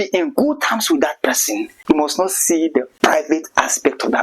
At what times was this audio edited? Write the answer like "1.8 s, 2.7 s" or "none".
1.7 s